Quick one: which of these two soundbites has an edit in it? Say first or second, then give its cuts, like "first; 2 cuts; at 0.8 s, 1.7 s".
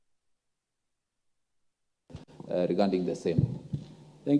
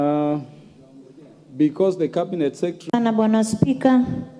second; 1 cut; at 2.9 s